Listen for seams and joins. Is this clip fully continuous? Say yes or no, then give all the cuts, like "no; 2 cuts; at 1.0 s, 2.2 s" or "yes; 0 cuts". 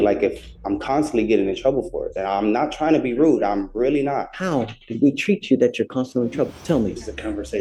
yes; 0 cuts